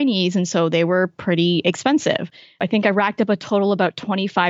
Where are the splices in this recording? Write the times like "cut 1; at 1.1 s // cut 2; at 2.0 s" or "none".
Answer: cut 1; at 2.6 s